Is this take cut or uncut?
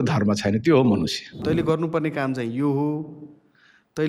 cut